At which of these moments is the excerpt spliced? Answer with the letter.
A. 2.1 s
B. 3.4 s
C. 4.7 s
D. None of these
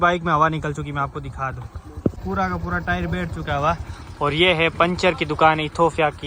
A